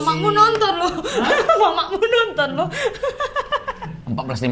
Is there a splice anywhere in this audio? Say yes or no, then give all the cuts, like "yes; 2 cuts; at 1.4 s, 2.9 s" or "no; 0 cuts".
no; 0 cuts